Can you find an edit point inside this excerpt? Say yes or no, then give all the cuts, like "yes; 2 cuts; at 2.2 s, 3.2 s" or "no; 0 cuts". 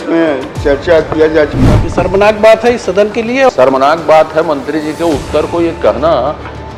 yes; 2 cuts; at 1.6 s, 3.5 s